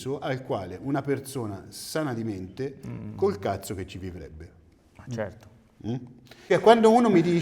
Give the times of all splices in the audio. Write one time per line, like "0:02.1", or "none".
0:06.4

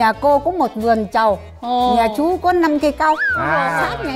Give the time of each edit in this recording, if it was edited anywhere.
none

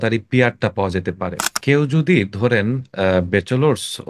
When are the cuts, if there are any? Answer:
0:01.5

